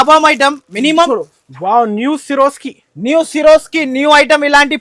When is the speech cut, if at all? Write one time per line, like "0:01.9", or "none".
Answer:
0:01.1